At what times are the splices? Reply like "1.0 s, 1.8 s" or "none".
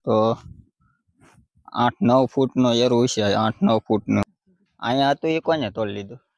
4.3 s